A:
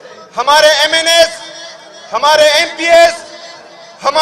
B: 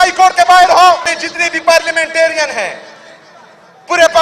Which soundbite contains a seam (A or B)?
B